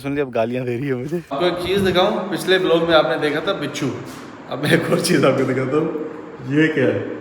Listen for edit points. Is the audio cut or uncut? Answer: cut